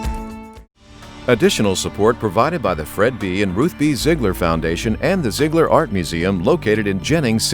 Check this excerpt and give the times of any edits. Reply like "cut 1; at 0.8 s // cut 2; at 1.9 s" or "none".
cut 1; at 1.1 s